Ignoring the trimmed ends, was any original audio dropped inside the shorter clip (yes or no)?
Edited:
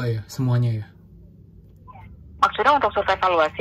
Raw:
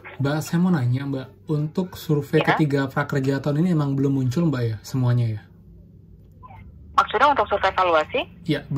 no